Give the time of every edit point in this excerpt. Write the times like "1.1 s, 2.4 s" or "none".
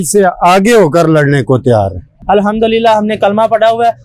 2.1 s